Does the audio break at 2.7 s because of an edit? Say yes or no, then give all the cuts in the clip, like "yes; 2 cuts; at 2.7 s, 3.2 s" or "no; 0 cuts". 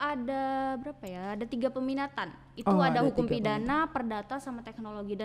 no; 0 cuts